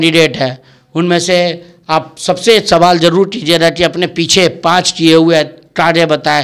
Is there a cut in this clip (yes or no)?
no